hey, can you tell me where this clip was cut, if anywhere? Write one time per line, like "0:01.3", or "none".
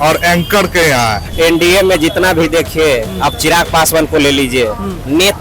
0:01.2